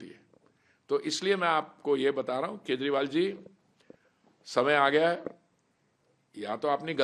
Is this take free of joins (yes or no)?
yes